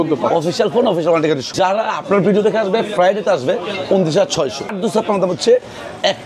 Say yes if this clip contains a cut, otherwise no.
yes